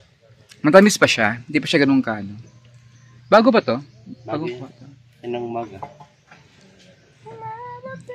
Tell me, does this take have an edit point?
no; 0 cuts

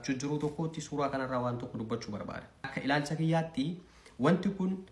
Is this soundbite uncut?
no; 1 cut; at 2.7 s

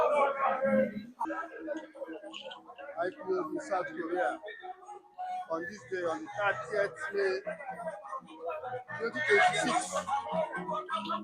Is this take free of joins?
no; 1 cut; at 1.2 s

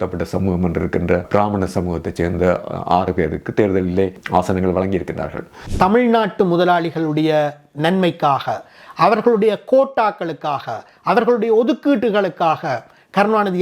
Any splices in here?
yes; 3 cuts; at 1.3 s, 4.2 s, 5.6 s

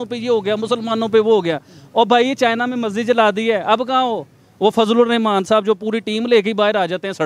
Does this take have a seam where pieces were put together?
no; 0 cuts

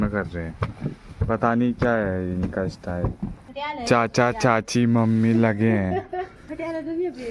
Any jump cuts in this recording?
yes; 2 cuts; at 3.4 s, 6.4 s

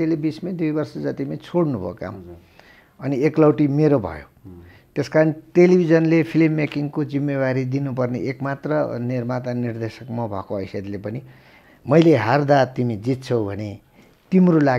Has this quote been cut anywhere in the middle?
yes; 1 cut; at 11.5 s

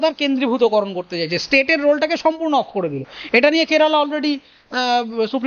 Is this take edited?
no; 0 cuts

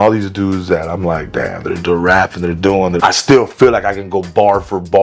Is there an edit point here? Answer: yes; 1 cut; at 3.0 s

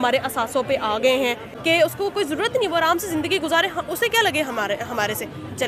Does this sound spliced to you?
yes; 1 cut; at 1.4 s

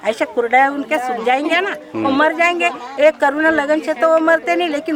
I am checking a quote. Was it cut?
no; 0 cuts

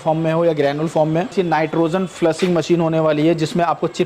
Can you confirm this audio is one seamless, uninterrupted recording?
no; 1 cut; at 1.3 s

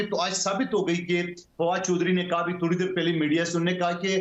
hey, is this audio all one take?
yes; 0 cuts

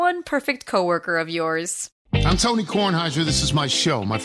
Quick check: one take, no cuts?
no; 1 cut; at 1.8 s

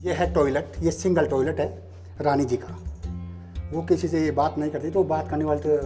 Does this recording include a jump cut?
no; 0 cuts

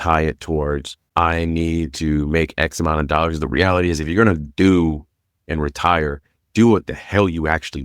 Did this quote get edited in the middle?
yes; 1 cut; at 1.0 s

